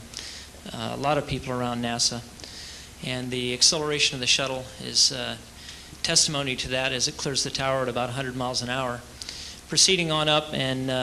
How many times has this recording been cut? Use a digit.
1